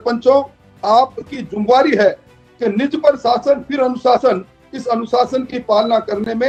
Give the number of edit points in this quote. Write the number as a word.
zero